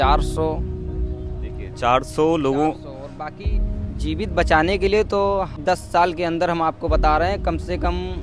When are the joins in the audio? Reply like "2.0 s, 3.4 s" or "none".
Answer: 5.6 s